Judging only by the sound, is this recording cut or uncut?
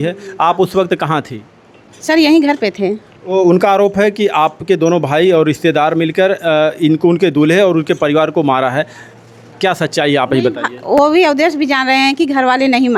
uncut